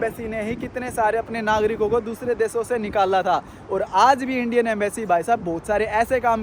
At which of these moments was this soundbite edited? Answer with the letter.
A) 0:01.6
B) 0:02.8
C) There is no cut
C